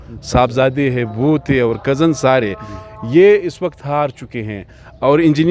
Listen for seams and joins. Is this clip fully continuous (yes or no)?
yes